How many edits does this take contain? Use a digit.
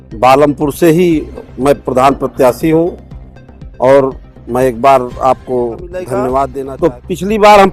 1